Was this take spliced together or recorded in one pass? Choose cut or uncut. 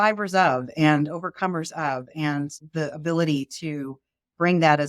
cut